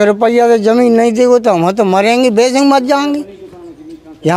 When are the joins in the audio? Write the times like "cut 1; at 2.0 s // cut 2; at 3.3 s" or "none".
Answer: none